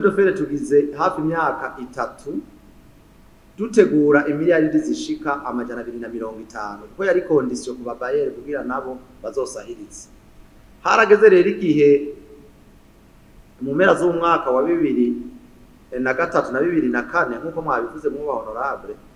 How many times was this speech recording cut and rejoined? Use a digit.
0